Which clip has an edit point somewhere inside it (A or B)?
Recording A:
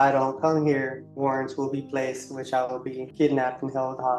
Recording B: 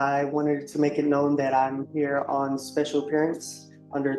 A